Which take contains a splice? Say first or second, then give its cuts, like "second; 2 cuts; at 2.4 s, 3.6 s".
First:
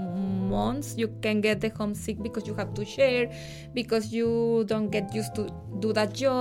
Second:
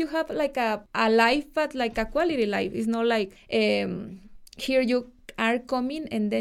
second; 2 cuts; at 0.9 s, 3.4 s